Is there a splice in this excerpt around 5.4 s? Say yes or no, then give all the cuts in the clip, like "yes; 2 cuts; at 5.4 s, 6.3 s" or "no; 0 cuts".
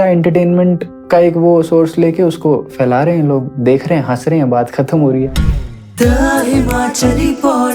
yes; 1 cut; at 5.4 s